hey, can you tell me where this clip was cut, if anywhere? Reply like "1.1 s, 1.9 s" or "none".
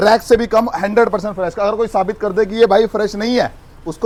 none